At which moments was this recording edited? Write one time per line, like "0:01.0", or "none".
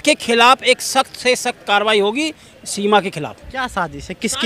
none